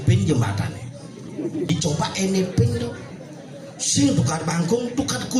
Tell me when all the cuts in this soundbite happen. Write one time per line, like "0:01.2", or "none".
0:01.7